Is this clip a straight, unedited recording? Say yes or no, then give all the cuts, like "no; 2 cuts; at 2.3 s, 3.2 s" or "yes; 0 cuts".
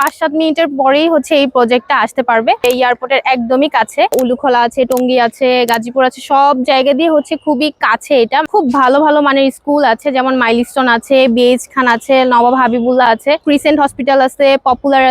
no; 4 cuts; at 2.6 s, 4.1 s, 8.5 s, 13.4 s